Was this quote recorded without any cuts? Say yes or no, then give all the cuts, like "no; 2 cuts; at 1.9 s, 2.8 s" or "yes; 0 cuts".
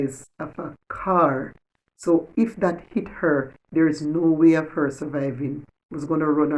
yes; 0 cuts